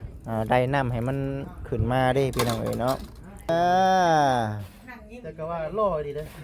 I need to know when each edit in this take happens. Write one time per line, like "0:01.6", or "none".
0:03.5